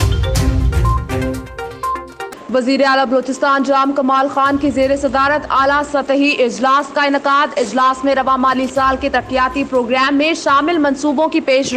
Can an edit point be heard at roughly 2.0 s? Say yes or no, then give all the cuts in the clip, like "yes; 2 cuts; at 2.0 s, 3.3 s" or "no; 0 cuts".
yes; 1 cut; at 2.0 s